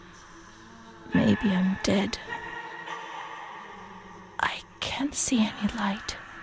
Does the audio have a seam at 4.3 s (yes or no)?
yes